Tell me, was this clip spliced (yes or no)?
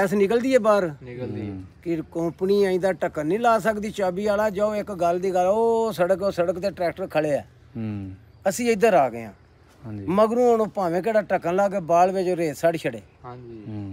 no